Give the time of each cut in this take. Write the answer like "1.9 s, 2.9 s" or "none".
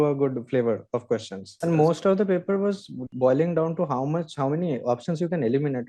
1.5 s, 3.1 s